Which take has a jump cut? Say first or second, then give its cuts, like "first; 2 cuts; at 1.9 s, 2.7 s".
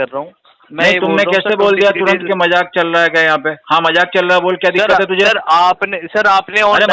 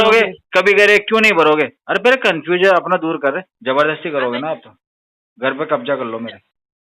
second; 1 cut; at 3.5 s